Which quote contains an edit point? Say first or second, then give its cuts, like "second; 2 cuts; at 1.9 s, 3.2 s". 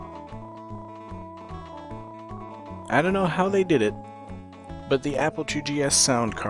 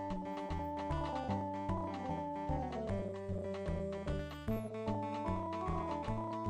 second; 1 cut; at 1.8 s